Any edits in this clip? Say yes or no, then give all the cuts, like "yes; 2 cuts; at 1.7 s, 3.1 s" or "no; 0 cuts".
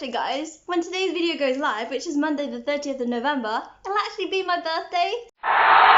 no; 0 cuts